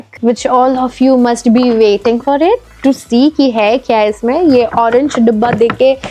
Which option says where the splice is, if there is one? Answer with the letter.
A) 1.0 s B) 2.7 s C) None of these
C